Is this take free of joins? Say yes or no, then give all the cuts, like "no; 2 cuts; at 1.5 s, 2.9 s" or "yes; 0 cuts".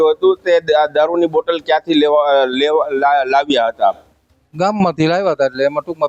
yes; 0 cuts